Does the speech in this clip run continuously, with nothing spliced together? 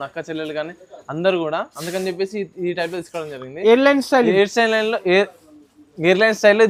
yes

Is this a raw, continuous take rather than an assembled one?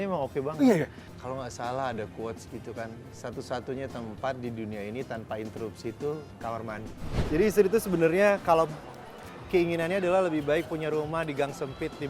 no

